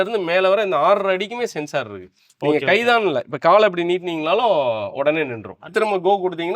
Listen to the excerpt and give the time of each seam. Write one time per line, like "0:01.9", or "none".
0:05.6